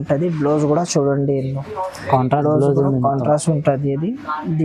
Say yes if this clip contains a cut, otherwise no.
no